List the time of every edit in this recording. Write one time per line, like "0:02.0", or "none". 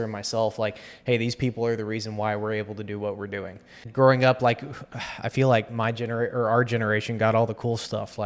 0:03.8